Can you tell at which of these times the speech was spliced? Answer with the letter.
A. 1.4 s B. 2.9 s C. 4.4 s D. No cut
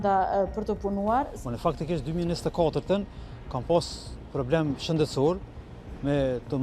A